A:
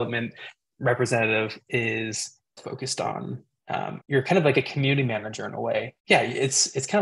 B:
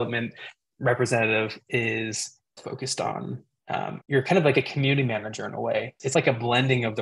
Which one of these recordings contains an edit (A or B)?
B